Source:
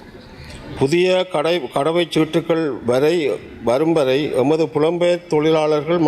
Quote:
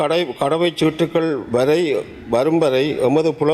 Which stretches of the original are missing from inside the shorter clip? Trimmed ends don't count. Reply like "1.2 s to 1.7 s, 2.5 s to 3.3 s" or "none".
none